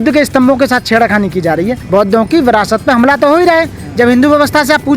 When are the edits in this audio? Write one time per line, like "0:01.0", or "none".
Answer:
0:01.8